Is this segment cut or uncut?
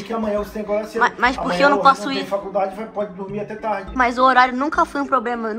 cut